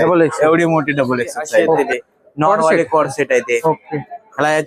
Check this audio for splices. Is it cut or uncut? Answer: cut